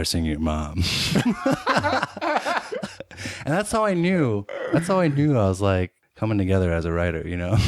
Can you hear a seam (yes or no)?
no